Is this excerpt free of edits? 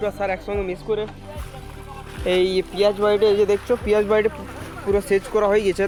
yes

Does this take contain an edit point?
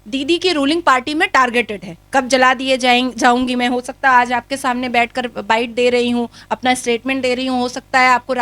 no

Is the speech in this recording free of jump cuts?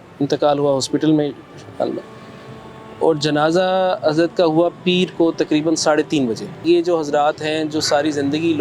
no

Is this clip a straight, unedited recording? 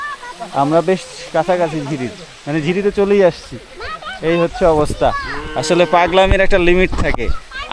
yes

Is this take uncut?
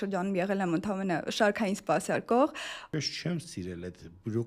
no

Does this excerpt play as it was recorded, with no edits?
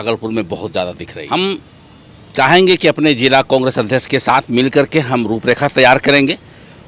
no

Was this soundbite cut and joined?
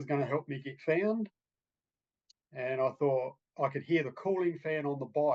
no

